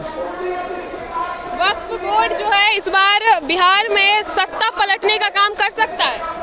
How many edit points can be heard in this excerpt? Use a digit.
0